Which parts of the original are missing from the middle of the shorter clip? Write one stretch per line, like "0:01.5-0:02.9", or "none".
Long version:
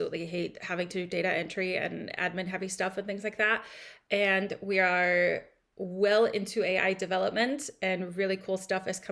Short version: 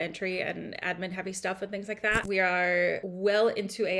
0:03.6-0:04.6
0:05.5-0:05.8